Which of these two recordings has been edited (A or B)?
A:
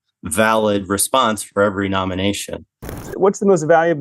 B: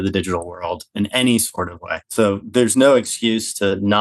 A